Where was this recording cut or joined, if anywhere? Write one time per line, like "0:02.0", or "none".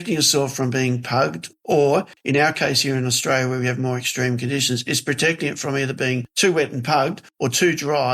0:02.1
0:06.3
0:07.2